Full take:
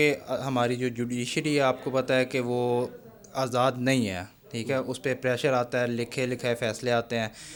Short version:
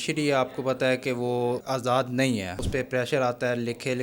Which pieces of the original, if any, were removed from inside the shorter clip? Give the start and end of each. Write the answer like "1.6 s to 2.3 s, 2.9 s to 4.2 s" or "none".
2.9 s to 3.3 s, 4.3 s to 4.9 s